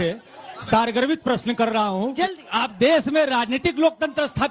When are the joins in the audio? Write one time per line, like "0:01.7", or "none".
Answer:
0:02.2